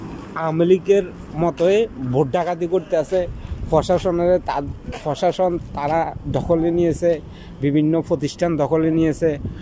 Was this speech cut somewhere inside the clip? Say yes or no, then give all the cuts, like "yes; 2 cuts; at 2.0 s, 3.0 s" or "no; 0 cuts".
no; 0 cuts